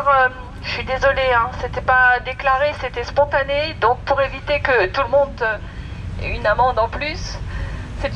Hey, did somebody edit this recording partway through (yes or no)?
no